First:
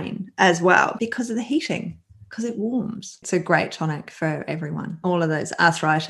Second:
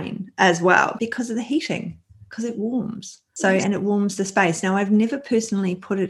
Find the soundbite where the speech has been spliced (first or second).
first